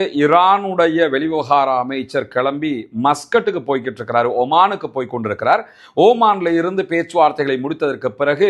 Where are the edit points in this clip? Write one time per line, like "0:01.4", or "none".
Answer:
none